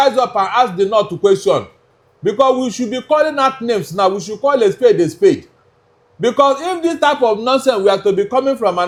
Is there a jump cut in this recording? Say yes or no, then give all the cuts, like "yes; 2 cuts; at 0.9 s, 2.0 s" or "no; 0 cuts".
no; 0 cuts